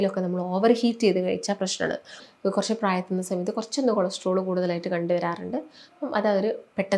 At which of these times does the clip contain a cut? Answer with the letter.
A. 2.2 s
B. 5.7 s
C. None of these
A